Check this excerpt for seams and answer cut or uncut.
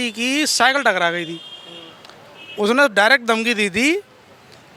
uncut